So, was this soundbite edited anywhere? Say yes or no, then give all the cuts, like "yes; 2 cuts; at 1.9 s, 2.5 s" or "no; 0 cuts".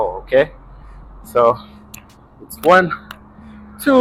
no; 0 cuts